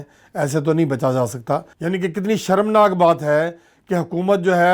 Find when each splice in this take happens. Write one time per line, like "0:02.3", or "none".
0:01.7